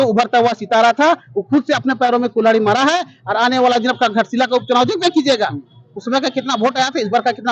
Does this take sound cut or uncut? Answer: uncut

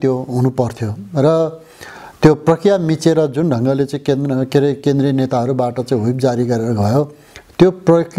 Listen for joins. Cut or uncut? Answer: uncut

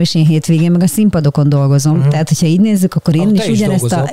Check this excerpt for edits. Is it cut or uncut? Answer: uncut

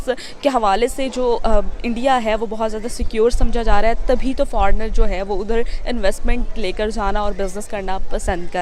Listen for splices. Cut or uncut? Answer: uncut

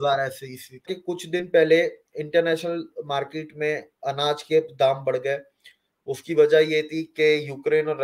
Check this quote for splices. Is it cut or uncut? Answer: cut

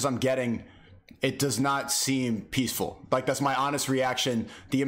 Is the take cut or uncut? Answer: uncut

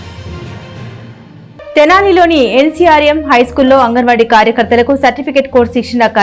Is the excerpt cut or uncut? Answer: cut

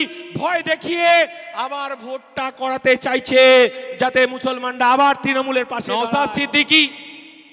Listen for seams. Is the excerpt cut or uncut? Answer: cut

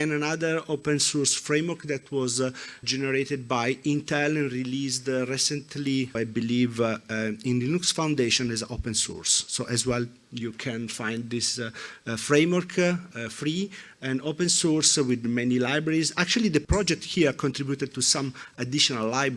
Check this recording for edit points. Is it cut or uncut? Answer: cut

